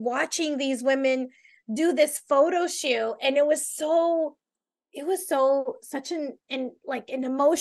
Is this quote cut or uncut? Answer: uncut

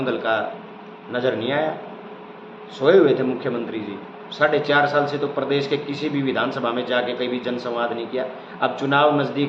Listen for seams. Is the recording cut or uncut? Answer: uncut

